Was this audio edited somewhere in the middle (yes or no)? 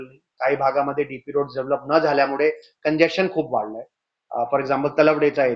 no